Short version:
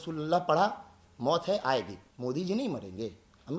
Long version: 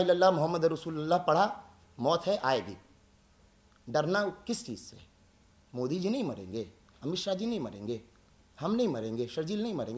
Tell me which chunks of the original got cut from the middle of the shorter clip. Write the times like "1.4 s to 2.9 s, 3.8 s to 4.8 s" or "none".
2.8 s to 5.6 s